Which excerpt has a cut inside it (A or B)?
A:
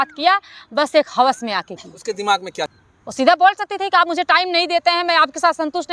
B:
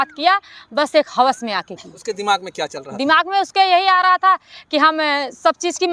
A